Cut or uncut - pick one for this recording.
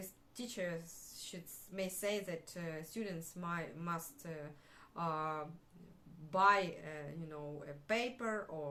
uncut